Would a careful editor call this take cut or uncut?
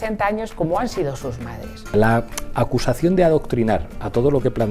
cut